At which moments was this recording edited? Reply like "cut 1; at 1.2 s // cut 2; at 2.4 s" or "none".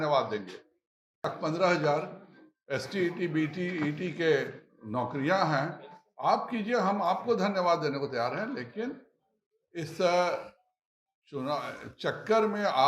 cut 1; at 1.3 s